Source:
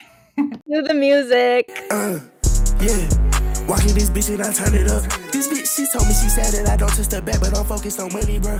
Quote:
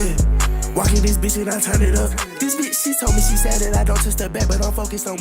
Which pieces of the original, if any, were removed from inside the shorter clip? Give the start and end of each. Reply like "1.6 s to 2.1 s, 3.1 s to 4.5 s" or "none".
none